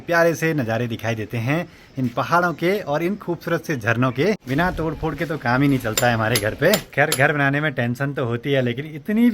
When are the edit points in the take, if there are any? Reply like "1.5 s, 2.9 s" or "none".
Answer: 4.4 s, 6.9 s